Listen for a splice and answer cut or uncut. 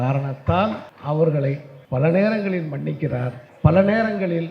cut